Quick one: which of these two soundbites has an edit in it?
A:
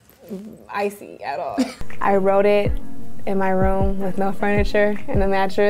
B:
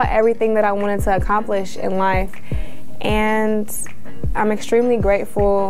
A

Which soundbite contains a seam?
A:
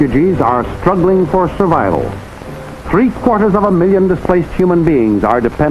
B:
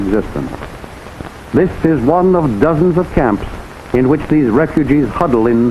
A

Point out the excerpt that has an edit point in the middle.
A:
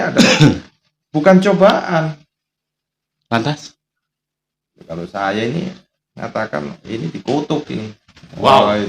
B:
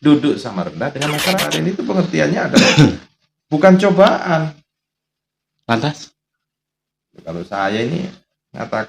B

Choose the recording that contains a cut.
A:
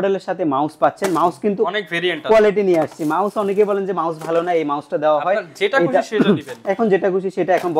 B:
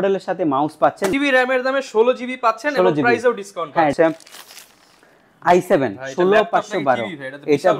B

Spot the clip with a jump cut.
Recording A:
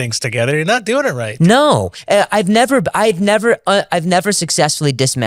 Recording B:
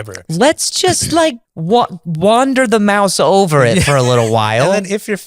B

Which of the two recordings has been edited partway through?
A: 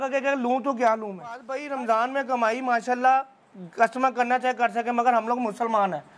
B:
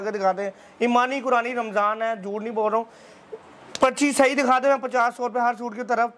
A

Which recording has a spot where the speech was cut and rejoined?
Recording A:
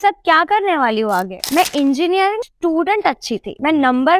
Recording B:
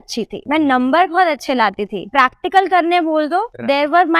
A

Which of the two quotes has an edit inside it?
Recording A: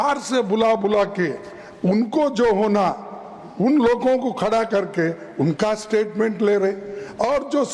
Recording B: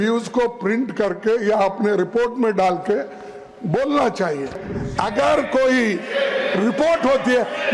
B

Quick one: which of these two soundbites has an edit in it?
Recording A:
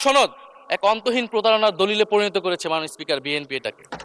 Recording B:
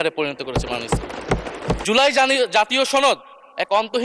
B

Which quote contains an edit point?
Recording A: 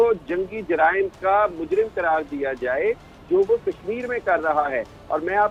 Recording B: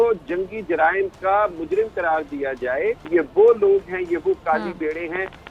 B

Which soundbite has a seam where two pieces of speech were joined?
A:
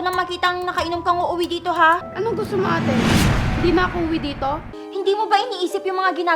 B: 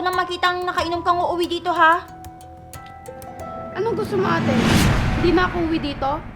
A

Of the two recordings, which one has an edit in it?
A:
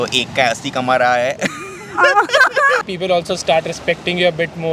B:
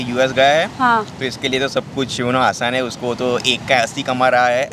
A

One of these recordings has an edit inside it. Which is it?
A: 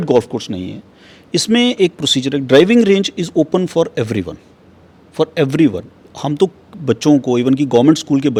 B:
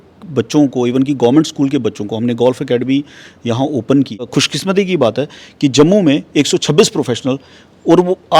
B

